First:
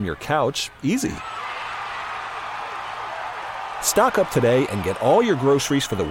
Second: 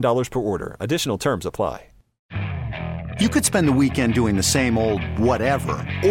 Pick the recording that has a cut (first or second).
second